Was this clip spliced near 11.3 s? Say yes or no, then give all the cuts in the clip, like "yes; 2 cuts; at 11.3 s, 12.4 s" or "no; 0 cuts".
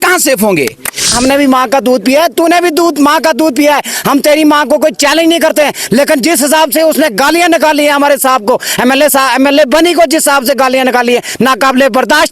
no; 1 cut; at 1.1 s